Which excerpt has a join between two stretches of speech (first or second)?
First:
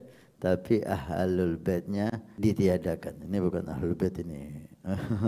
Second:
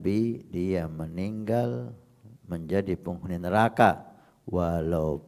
first